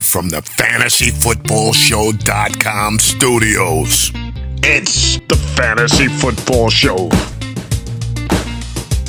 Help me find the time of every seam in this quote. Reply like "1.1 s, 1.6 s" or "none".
none